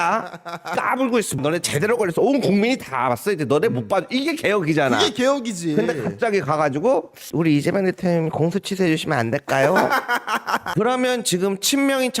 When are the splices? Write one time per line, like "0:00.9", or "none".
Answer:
0:10.7